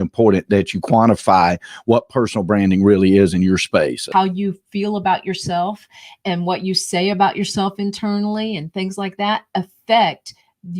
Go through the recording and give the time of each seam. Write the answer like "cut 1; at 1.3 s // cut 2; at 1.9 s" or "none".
cut 1; at 4.1 s